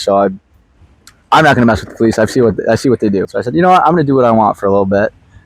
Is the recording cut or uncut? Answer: cut